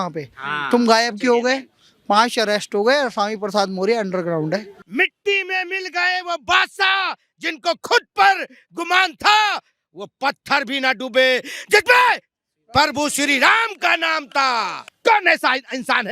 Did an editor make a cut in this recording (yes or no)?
yes